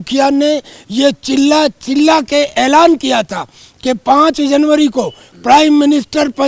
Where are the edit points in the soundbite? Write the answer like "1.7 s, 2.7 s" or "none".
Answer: none